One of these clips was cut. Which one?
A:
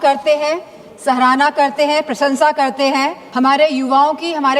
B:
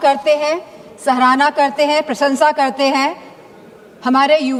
A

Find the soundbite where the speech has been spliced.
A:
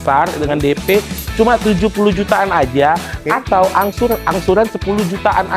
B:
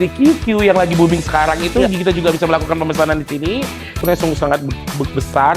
B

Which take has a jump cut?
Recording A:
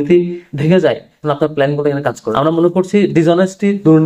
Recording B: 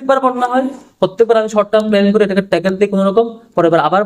A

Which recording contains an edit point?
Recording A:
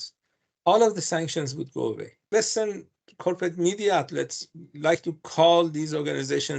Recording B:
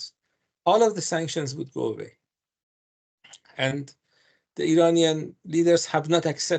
A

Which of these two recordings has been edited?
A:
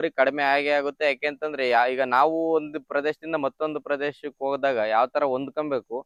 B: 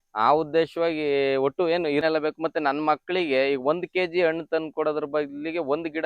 B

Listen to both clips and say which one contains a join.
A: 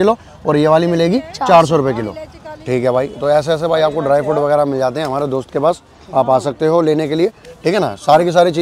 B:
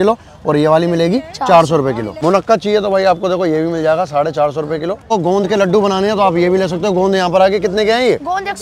B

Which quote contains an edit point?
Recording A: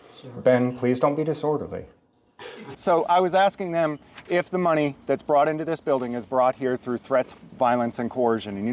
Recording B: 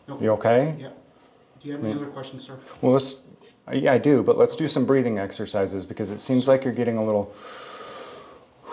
A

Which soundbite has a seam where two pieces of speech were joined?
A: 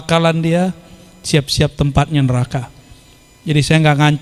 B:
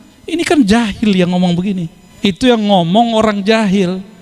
B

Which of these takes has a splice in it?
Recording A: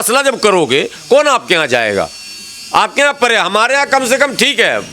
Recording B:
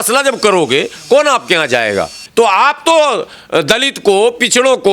B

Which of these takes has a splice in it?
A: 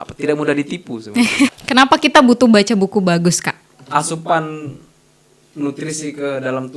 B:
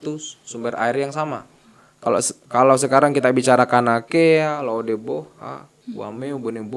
A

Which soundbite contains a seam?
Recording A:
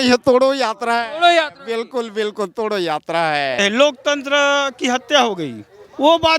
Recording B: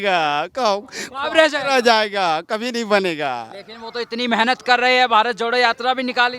A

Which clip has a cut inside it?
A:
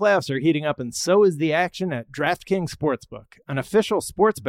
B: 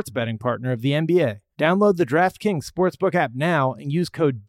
B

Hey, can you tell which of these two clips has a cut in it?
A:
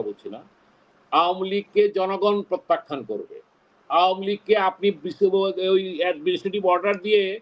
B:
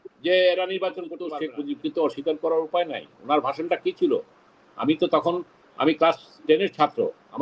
B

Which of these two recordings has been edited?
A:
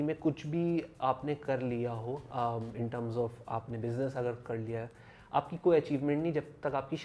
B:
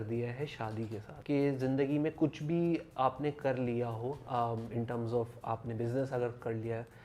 B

